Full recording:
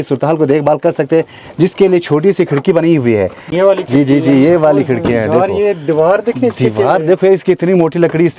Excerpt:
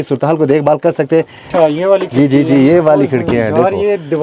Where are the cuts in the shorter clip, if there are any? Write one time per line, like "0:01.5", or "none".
0:01.5